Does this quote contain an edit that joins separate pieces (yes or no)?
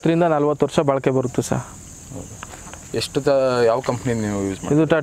no